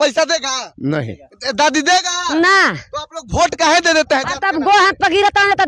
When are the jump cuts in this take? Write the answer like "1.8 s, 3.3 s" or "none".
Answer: none